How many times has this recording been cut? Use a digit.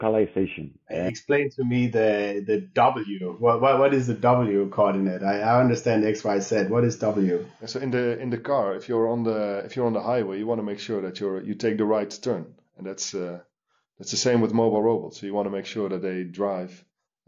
2